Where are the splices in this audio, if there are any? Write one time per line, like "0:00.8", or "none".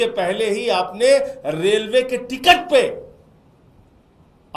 none

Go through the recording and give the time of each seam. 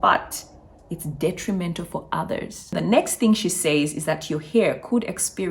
0:02.9

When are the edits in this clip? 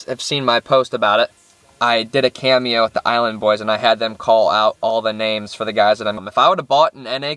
0:01.3
0:06.2

